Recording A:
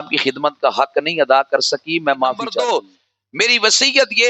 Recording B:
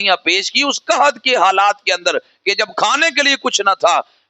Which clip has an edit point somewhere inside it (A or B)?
A